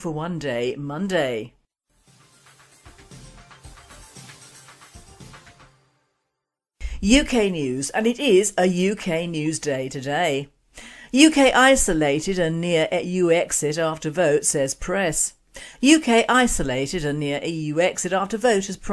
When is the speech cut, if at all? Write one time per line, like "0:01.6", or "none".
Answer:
0:05.1